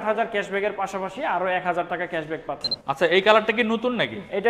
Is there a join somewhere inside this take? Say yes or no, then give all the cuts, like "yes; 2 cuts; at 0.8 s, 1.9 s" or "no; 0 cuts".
yes; 1 cut; at 2.7 s